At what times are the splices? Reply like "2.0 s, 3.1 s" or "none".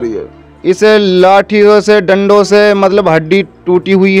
none